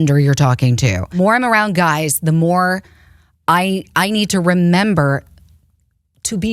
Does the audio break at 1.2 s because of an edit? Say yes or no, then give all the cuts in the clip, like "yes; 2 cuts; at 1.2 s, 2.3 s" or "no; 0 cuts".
yes; 1 cut; at 1.2 s